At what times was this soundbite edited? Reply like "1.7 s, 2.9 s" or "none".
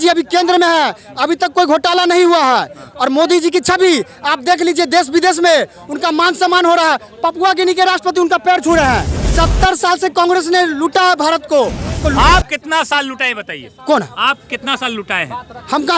9.2 s, 12.0 s